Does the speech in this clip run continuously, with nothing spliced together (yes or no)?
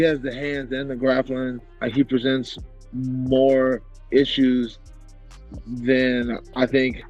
yes